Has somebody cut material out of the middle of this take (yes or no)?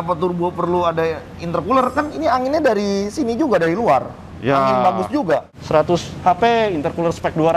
yes